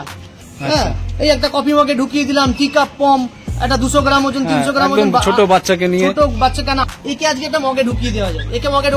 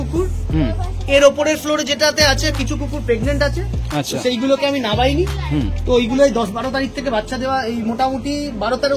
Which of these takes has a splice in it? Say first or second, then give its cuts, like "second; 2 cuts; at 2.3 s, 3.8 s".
first; 1 cut; at 6.8 s